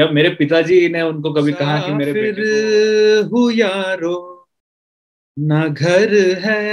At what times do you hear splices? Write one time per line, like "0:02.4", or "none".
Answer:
0:02.1